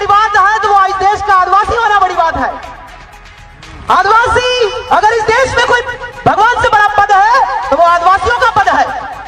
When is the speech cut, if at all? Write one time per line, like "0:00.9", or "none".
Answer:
0:02.1